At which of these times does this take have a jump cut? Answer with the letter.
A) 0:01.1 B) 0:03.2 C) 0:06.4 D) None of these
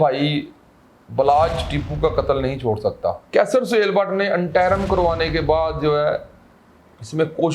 B